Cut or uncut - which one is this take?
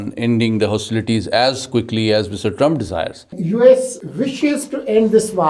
cut